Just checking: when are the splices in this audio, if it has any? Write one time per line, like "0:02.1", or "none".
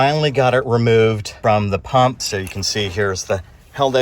0:01.3
0:02.2